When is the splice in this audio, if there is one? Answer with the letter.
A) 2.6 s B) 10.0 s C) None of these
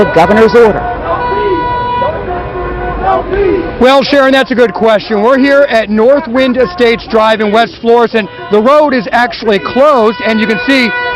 C